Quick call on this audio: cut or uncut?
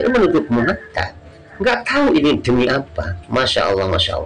uncut